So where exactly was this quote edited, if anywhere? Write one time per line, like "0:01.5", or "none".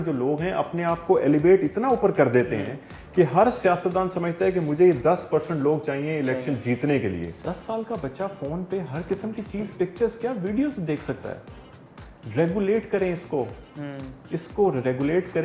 0:07.4